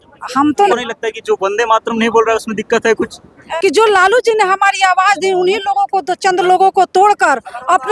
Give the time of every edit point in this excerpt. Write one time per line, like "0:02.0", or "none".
0:00.7
0:03.4